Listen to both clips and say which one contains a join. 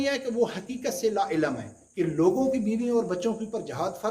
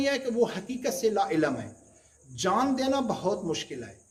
first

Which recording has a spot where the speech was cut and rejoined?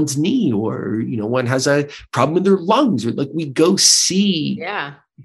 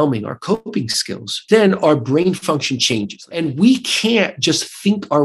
second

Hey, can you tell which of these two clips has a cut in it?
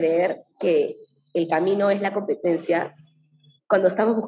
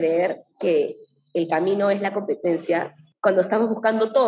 second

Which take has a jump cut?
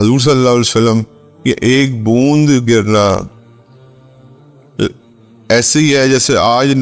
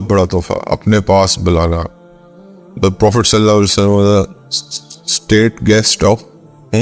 first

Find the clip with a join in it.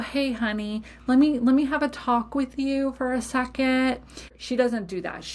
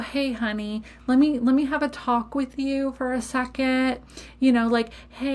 first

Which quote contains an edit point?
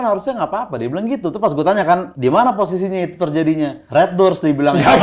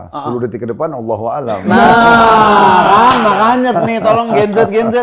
first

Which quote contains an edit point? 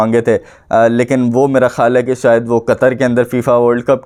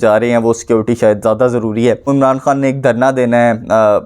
second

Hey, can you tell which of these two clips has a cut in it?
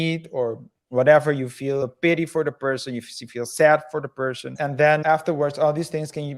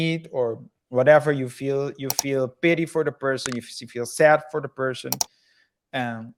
first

